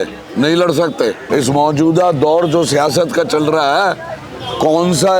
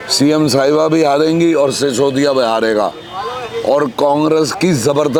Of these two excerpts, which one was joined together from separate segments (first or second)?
first